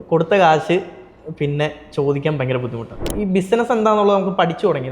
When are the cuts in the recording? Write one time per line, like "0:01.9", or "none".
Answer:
0:03.0

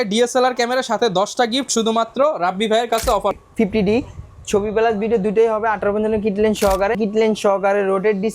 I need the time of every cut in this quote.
0:03.4
0:07.0

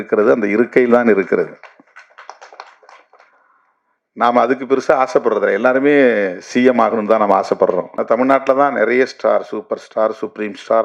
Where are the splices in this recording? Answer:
0:07.9

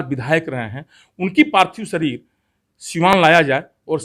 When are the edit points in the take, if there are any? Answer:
none

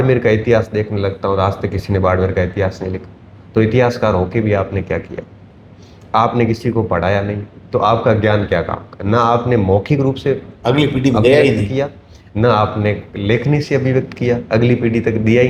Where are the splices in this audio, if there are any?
none

